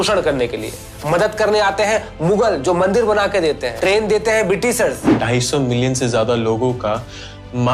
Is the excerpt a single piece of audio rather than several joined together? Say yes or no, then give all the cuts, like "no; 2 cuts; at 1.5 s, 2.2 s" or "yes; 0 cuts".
no; 2 cuts; at 3.7 s, 5.2 s